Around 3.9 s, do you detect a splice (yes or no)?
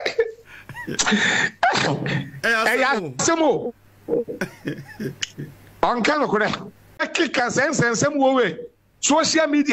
no